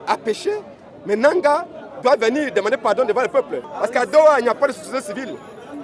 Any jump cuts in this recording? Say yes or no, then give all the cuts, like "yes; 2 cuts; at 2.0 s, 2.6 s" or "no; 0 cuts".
yes; 1 cut; at 3.6 s